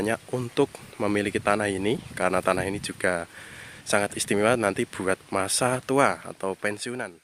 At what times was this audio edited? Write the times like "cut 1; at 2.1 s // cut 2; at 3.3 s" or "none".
none